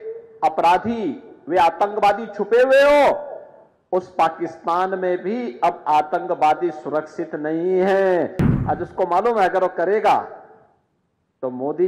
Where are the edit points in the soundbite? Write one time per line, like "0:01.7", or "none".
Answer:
0:08.4